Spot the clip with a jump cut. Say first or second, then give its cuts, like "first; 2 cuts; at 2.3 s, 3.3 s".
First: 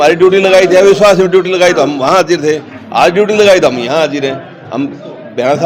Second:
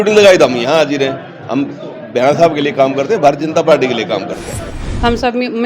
second; 1 cut; at 4.7 s